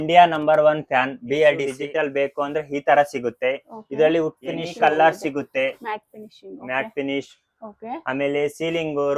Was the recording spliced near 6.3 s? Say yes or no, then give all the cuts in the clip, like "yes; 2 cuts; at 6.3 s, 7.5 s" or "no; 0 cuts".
no; 2 cuts; at 1.8 s, 4.7 s